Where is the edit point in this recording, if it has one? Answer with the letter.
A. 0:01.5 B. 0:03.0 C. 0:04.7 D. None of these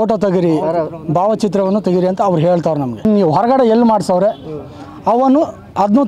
B